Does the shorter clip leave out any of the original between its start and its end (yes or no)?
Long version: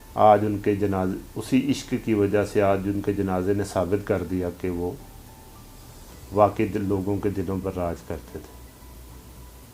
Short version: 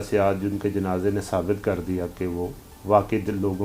yes